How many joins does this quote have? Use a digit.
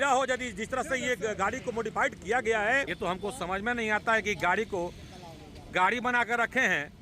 1